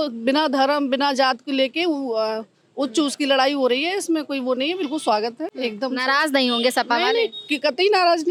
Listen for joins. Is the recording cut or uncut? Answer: uncut